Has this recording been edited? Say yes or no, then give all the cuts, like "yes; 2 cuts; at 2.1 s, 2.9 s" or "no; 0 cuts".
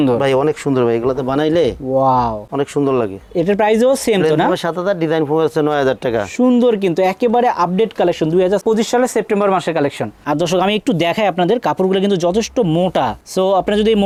no; 0 cuts